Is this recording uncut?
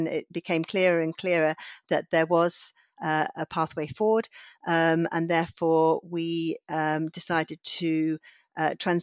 yes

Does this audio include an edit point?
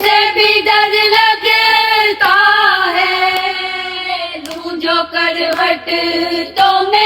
no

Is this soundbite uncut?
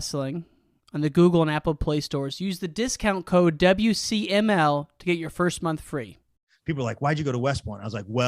no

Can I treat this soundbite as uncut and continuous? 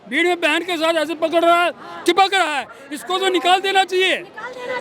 yes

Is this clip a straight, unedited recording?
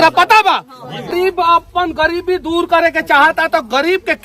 no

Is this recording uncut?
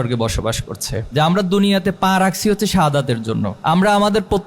no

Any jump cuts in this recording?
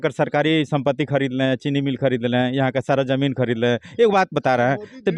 no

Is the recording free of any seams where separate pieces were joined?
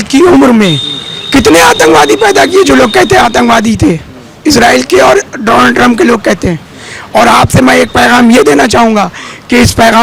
yes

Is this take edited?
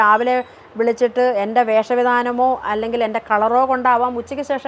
no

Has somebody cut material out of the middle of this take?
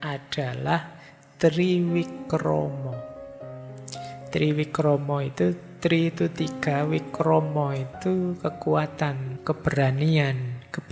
yes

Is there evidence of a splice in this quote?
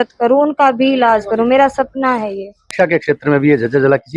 yes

